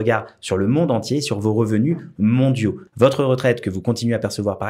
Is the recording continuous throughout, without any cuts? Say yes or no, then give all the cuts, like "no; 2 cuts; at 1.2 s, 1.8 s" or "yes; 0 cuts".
no; 1 cut; at 2.8 s